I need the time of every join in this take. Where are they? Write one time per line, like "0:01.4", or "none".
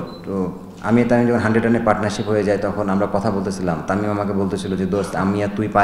none